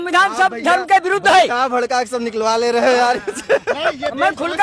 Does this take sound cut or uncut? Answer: uncut